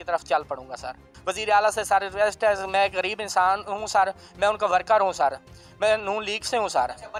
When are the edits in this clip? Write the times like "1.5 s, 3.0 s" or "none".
none